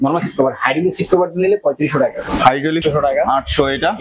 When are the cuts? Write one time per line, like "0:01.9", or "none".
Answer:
0:02.8